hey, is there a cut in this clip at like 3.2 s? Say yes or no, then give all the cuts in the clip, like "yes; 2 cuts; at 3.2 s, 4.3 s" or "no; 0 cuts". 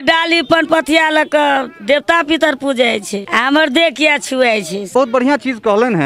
yes; 2 cuts; at 3.2 s, 4.9 s